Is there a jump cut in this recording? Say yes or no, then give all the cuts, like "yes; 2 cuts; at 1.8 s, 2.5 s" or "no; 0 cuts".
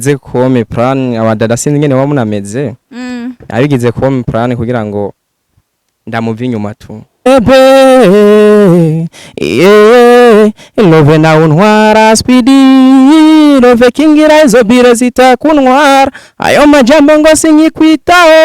yes; 1 cut; at 7.2 s